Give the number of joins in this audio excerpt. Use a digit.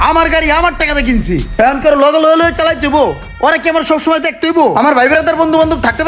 0